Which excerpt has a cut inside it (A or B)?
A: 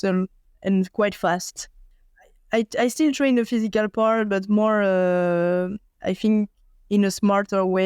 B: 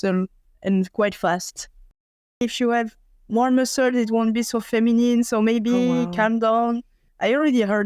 B